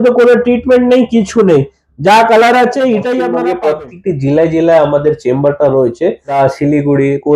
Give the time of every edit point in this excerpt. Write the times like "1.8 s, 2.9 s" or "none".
3.3 s, 6.4 s